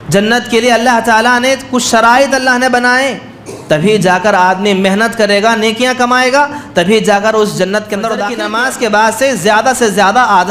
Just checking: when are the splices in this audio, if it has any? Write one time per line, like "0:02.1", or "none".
0:08.4